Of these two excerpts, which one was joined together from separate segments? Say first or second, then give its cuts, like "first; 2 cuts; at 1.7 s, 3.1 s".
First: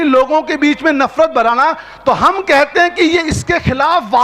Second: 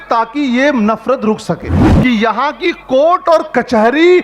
second; 1 cut; at 1.8 s